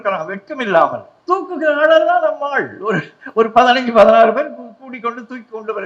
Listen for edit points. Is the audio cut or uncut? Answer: cut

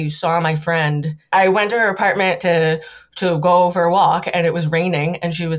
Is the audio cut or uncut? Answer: cut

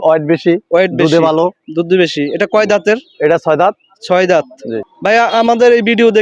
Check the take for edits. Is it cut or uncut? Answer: cut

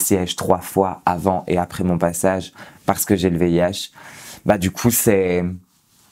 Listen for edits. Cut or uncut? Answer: uncut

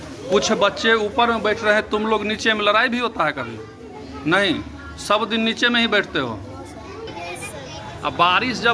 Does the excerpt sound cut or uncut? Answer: cut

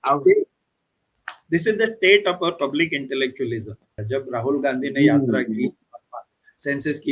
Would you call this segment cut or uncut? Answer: cut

